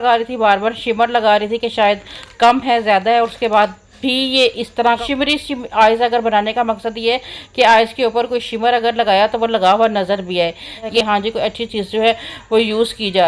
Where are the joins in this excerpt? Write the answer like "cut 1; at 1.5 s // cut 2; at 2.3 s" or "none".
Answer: cut 1; at 5.0 s // cut 2; at 11.0 s